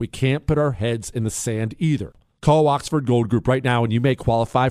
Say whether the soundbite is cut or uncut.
cut